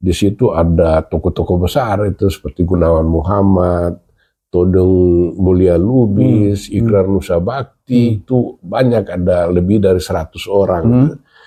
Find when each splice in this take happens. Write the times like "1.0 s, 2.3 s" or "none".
none